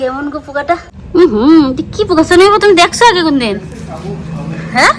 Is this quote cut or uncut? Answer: uncut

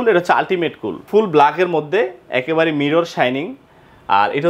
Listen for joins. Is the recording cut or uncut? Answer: cut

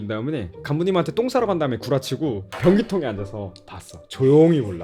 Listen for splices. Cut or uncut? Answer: uncut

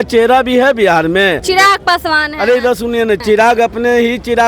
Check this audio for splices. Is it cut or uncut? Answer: cut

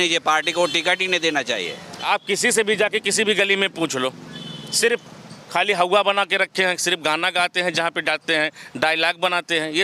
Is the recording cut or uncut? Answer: cut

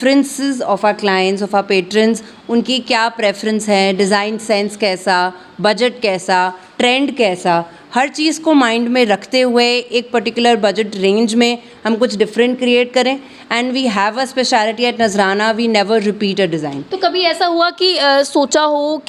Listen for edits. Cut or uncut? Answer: uncut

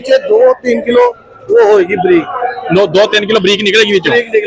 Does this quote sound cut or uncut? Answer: uncut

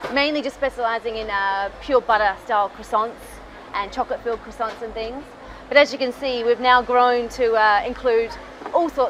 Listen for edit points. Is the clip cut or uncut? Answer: uncut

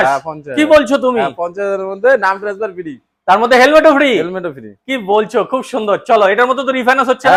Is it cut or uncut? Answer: uncut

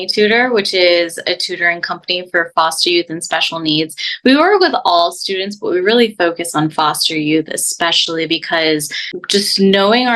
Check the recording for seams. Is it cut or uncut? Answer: uncut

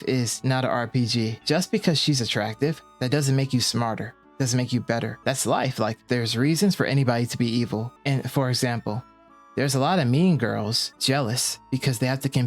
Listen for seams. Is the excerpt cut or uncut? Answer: cut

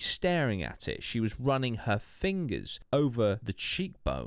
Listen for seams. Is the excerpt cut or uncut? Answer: cut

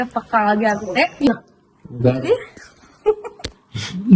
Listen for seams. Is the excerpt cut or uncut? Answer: cut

